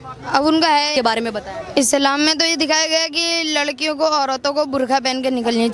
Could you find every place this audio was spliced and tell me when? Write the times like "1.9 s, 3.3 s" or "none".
0.9 s